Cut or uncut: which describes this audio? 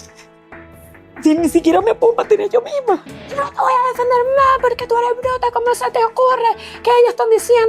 cut